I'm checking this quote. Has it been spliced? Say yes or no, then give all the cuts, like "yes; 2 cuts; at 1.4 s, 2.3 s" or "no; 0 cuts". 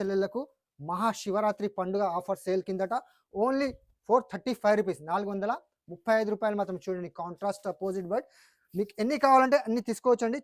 no; 0 cuts